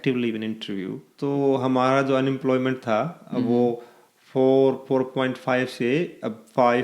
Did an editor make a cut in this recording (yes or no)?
yes